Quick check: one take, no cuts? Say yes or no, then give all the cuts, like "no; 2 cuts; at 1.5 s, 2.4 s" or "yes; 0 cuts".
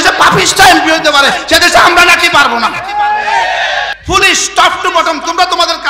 no; 1 cut; at 4.0 s